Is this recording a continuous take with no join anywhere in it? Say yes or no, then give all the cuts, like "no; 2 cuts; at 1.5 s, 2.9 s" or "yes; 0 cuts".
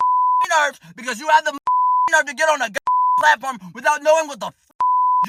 yes; 0 cuts